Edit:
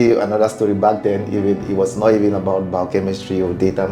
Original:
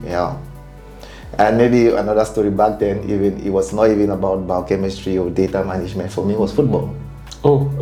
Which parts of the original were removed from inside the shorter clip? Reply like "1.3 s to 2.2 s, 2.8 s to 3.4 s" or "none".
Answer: none